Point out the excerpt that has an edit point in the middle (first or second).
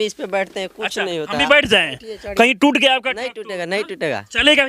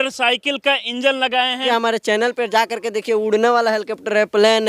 second